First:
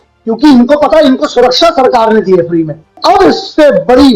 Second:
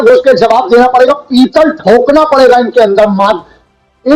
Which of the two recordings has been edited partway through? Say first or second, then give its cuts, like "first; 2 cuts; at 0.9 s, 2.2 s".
first; 1 cut; at 3.0 s